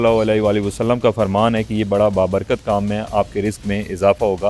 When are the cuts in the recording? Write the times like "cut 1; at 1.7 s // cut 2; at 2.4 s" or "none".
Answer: none